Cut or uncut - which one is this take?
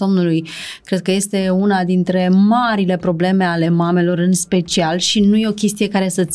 uncut